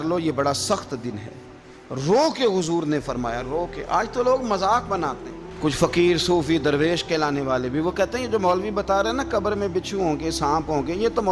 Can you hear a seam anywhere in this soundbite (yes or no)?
no